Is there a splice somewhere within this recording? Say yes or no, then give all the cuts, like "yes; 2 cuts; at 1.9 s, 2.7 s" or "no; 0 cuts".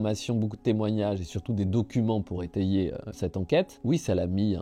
yes; 1 cut; at 3.6 s